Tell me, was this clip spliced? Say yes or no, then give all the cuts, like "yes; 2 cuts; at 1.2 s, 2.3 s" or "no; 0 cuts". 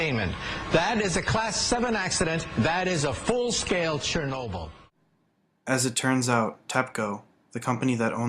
yes; 1 cut; at 1.1 s